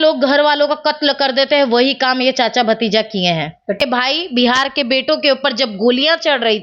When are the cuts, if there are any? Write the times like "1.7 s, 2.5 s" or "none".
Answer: 3.8 s